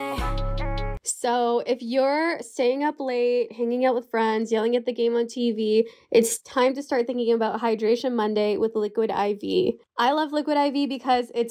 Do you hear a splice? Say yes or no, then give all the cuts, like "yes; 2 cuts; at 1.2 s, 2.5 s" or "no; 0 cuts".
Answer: yes; 1 cut; at 1.0 s